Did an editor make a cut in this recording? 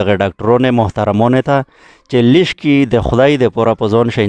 no; 0 cuts

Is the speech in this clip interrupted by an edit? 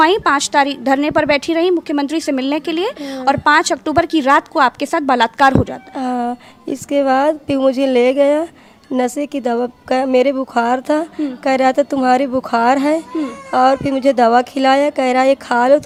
no; 0 cuts

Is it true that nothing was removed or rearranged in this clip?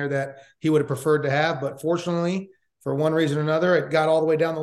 yes; 0 cuts

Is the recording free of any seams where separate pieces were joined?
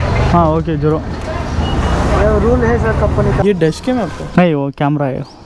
no; 1 cut; at 3.4 s

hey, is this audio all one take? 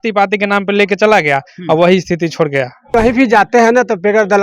no; 1 cut; at 3.0 s

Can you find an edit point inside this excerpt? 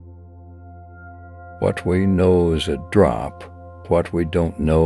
yes; 1 cut; at 1.6 s

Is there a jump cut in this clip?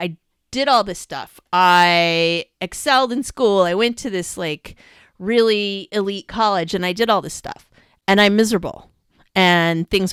no; 0 cuts

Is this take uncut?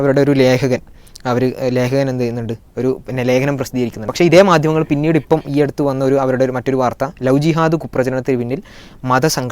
no; 1 cut; at 4.0 s

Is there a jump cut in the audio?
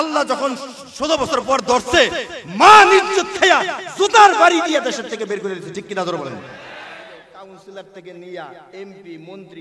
yes; 1 cut; at 7.3 s

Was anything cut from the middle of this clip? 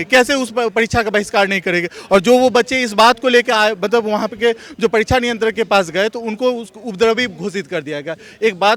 no; 0 cuts

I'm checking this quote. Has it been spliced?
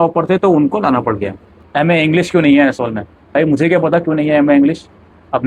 yes; 1 cut; at 1.6 s

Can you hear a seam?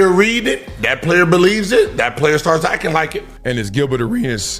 yes; 1 cut; at 3.3 s

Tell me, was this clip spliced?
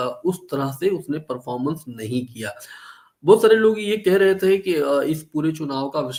no; 0 cuts

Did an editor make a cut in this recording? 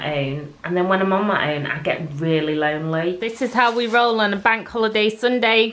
yes; 1 cut; at 3.3 s

